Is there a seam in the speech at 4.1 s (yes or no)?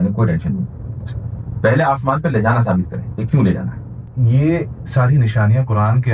yes